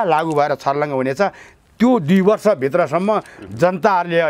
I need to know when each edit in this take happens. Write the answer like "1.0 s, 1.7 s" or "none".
none